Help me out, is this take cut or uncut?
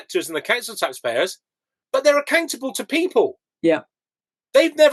uncut